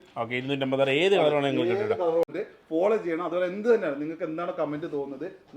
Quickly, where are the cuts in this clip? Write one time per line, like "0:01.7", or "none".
0:02.3